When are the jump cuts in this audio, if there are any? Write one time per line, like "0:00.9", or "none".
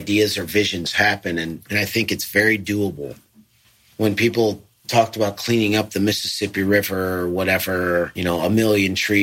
0:01.6
0:03.5
0:04.7
0:08.1